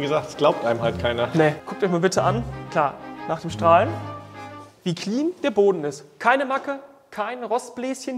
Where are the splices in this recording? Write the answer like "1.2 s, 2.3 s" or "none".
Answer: 1.7 s, 2.6 s